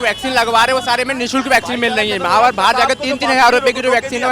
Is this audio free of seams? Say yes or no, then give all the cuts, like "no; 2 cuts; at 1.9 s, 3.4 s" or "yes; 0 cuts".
yes; 0 cuts